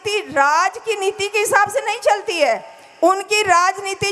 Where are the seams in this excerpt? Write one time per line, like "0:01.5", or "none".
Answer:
none